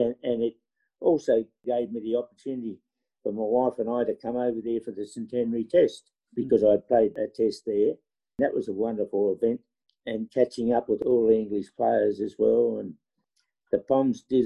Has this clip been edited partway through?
yes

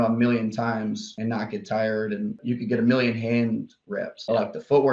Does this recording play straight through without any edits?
no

